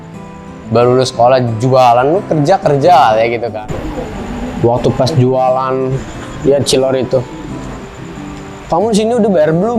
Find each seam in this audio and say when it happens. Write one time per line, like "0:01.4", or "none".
0:03.5